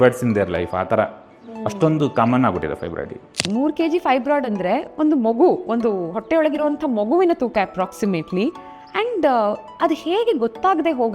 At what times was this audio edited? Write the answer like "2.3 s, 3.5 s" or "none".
3.4 s

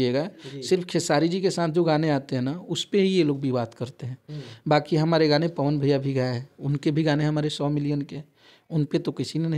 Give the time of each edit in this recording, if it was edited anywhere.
none

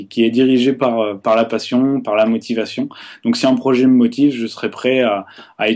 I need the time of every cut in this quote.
none

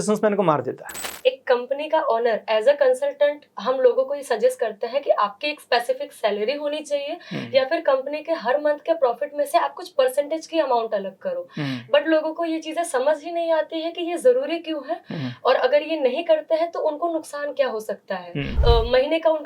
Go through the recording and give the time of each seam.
1.2 s, 18.5 s

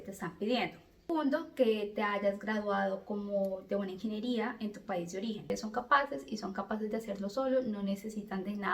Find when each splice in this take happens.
1.1 s, 5.5 s

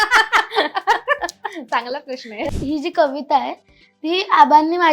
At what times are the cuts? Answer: 2.4 s

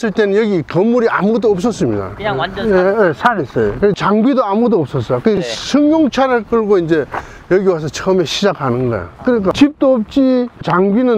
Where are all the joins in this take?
4.0 s

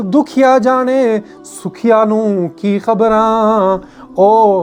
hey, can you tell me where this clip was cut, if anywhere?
none

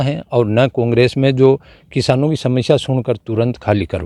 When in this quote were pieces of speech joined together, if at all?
none

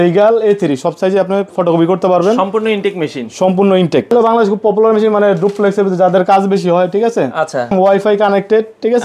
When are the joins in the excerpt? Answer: 4.1 s, 7.7 s

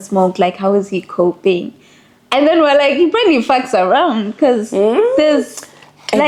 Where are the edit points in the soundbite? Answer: none

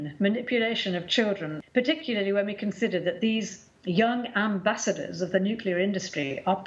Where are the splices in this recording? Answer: 1.5 s

